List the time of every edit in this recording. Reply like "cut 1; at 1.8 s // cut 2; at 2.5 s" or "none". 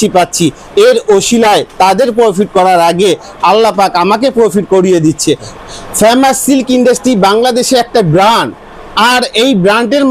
cut 1; at 5.5 s